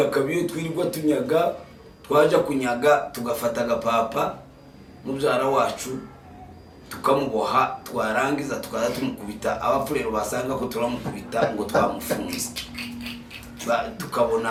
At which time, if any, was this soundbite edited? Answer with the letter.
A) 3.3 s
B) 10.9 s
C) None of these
C